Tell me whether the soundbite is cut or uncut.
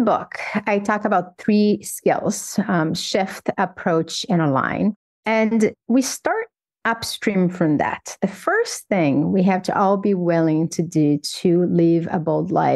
cut